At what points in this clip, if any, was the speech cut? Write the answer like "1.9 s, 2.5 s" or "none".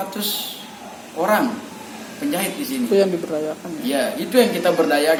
none